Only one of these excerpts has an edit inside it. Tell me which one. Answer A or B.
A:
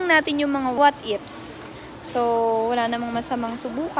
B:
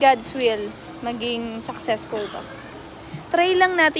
B